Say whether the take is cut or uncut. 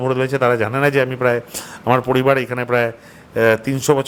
uncut